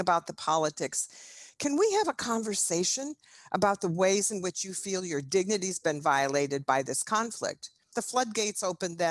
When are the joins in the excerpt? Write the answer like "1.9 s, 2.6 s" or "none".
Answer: 7.8 s